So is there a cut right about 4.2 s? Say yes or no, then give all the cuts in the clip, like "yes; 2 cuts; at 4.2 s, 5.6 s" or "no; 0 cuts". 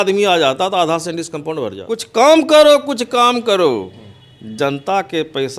no; 1 cut; at 1.9 s